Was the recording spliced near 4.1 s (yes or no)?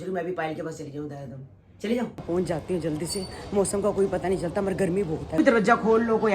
no